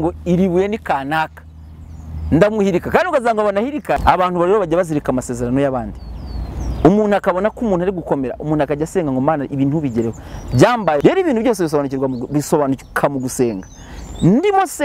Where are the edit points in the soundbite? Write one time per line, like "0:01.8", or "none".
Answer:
0:04.0
0:11.0